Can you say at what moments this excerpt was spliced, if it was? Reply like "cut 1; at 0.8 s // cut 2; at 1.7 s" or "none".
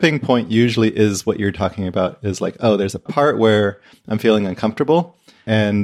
none